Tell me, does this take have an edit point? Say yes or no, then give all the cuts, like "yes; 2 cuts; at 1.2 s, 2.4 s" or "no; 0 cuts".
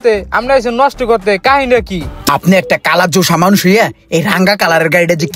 yes; 1 cut; at 2.2 s